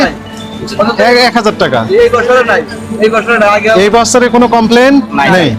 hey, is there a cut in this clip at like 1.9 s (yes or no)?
no